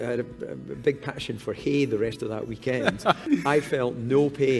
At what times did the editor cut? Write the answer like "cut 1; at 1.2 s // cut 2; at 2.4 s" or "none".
cut 1; at 3.2 s